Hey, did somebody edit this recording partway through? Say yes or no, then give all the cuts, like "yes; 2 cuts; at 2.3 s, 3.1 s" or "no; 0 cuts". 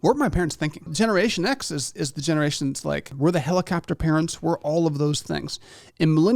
yes; 2 cuts; at 0.9 s, 3.1 s